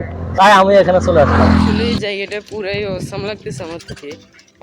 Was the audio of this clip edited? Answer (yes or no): yes